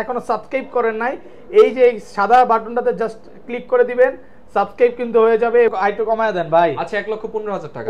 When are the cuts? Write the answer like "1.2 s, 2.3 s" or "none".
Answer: 5.7 s